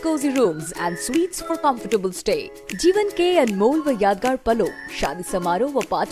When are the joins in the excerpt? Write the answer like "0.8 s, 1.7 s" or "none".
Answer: none